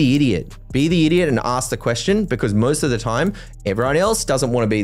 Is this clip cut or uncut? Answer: uncut